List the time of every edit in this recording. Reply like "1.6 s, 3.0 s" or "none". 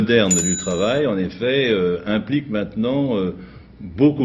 none